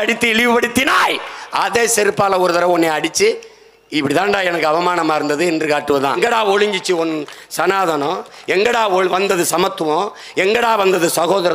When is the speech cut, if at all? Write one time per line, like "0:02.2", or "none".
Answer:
0:06.2